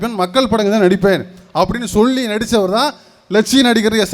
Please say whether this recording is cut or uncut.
uncut